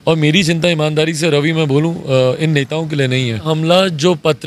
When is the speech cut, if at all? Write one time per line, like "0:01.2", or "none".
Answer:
0:03.5